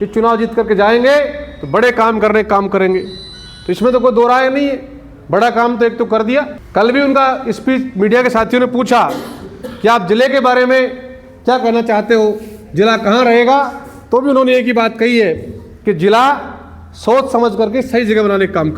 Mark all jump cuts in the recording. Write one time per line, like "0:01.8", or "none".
0:06.6